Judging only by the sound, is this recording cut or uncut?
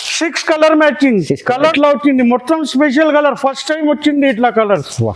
cut